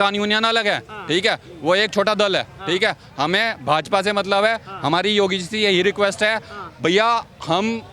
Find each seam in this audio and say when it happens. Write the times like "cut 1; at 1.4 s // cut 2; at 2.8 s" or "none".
none